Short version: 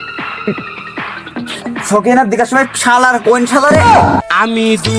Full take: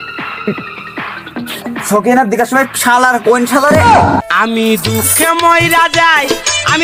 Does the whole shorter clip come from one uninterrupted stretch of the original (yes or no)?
yes